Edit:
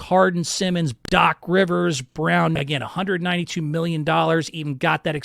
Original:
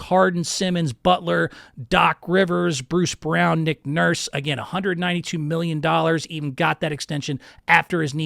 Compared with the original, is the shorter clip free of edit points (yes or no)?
no